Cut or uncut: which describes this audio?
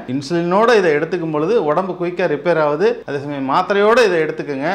uncut